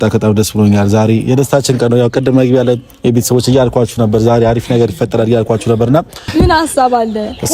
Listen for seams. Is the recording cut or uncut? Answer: cut